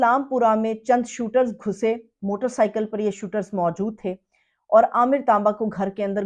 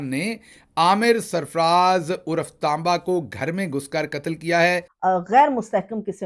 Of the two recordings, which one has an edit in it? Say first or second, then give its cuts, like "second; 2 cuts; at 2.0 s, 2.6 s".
second; 1 cut; at 4.9 s